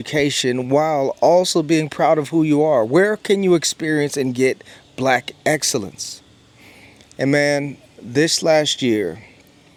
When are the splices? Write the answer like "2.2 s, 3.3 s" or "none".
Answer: none